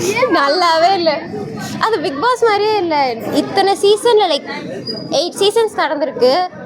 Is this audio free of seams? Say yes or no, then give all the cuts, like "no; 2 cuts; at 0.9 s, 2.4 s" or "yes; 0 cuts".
yes; 0 cuts